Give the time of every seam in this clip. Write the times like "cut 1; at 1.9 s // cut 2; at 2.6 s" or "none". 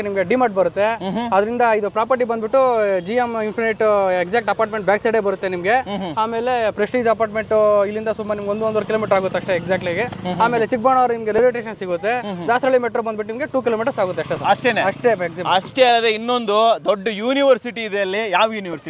none